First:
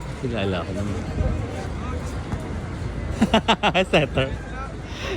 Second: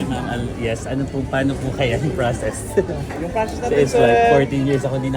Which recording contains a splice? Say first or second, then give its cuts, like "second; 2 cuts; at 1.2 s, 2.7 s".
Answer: first; 1 cut; at 1.7 s